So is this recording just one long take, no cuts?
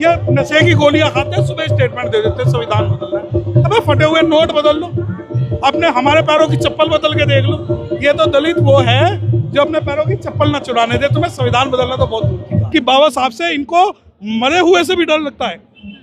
no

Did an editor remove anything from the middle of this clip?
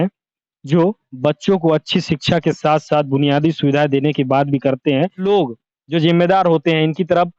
yes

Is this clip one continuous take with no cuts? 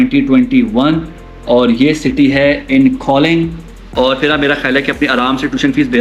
no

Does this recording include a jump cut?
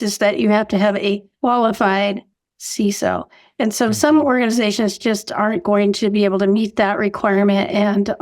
yes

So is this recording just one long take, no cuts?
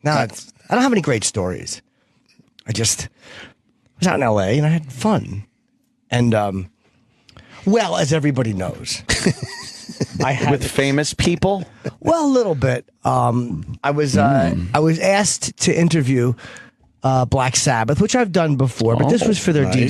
no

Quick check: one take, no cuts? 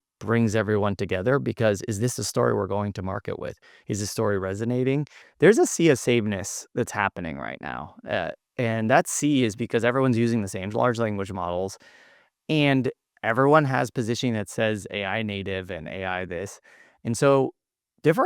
no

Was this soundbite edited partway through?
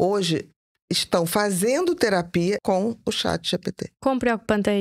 yes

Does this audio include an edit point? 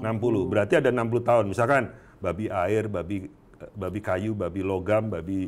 no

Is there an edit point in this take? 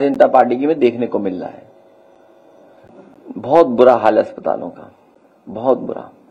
yes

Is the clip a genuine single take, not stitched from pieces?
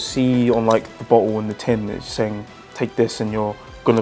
yes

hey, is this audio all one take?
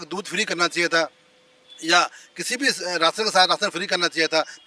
yes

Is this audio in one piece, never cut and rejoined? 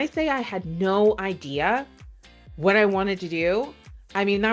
yes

